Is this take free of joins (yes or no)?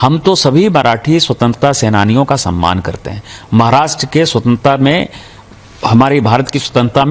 yes